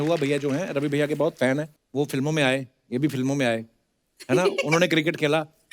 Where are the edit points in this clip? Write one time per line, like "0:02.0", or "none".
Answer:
0:01.8

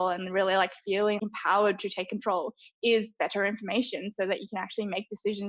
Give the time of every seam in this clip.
0:01.2

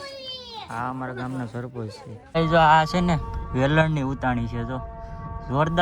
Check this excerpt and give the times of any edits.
0:02.4

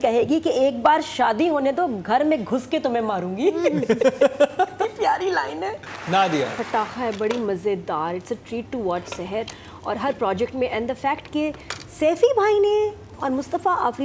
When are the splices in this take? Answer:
0:06.0

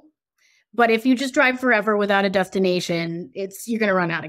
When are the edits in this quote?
none

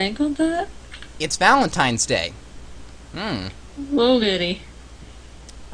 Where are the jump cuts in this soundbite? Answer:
0:02.8

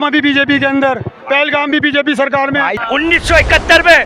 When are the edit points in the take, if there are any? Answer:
0:02.8

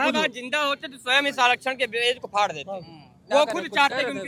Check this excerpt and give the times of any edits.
none

